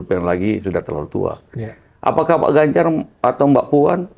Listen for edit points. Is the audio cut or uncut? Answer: uncut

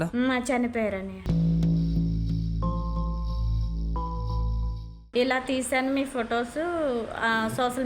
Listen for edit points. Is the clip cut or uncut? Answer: cut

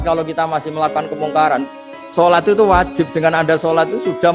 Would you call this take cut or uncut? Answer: cut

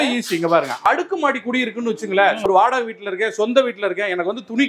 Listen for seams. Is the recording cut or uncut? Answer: cut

